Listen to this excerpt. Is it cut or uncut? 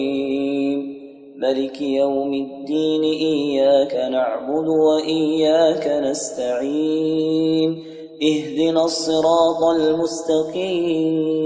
uncut